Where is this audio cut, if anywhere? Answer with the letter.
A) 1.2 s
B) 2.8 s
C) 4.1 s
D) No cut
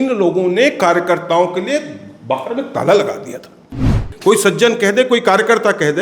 C